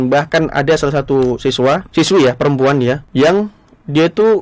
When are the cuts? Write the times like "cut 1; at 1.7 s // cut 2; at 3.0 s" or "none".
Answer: cut 1; at 1.9 s // cut 2; at 3.0 s